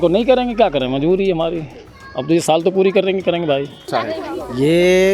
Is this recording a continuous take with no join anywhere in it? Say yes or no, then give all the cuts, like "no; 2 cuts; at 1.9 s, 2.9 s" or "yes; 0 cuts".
no; 1 cut; at 3.9 s